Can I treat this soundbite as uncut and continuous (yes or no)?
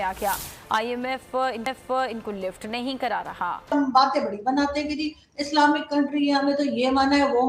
no